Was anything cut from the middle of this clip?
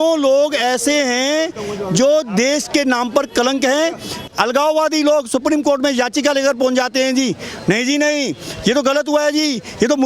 yes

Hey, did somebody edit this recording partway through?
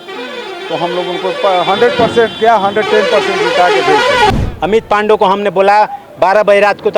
yes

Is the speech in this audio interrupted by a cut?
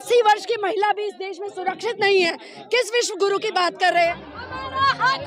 yes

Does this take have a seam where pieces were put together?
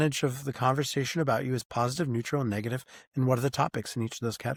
no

